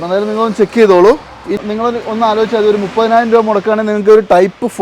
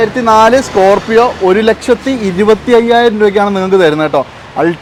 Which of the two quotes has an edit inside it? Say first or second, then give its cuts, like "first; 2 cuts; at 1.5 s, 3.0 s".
first; 1 cut; at 1.6 s